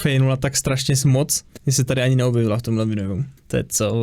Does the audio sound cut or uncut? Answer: cut